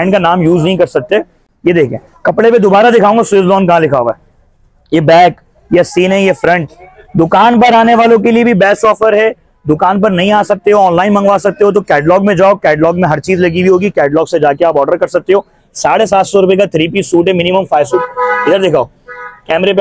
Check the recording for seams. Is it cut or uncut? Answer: uncut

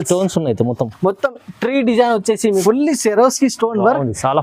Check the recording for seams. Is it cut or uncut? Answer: cut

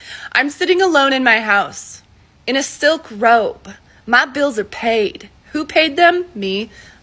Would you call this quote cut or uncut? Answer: uncut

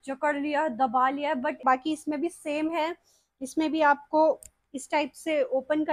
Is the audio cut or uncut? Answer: cut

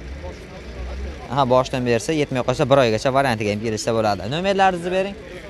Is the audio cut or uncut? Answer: uncut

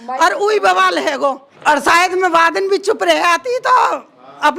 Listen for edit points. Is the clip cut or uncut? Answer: cut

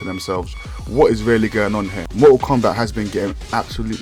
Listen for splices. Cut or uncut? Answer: cut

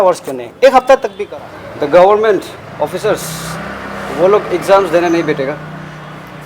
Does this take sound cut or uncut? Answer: cut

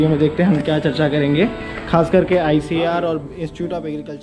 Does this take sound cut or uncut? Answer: uncut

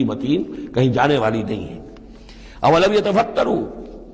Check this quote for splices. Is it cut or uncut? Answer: uncut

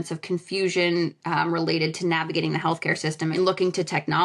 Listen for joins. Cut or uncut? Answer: cut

